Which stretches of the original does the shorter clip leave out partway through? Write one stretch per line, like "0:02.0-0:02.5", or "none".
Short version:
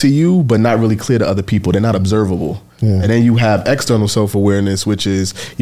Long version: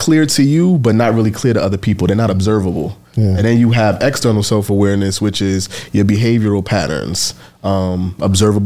none